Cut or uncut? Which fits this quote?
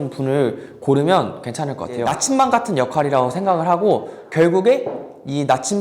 cut